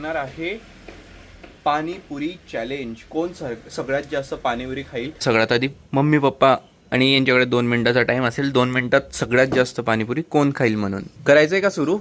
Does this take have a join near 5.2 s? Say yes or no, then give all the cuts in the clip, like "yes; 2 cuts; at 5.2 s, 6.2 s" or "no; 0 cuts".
yes; 2 cuts; at 5.2 s, 11.1 s